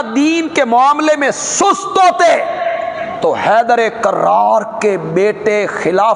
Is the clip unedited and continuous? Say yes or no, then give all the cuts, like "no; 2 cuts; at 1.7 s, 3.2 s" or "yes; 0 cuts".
yes; 0 cuts